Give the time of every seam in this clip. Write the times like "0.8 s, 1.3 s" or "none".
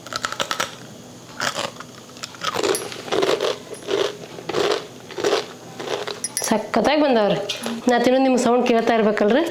7.7 s